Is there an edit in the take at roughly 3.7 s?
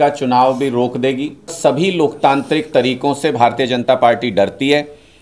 no; 1 cut; at 1.5 s

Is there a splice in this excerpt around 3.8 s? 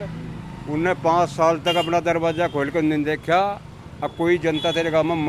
no; 0 cuts

